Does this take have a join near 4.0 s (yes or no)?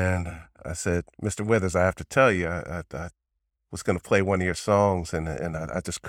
no